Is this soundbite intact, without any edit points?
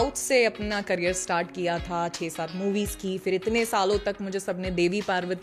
yes; 0 cuts

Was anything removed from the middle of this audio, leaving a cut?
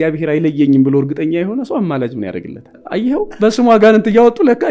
yes; 1 cut; at 2.7 s

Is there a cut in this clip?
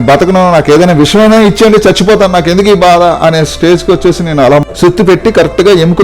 yes; 1 cut; at 4.6 s

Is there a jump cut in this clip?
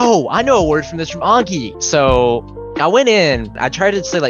no; 0 cuts

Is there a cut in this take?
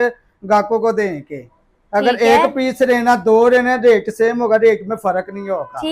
no; 0 cuts

